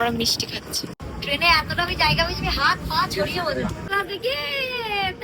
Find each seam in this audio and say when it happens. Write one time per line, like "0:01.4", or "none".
0:01.0
0:03.9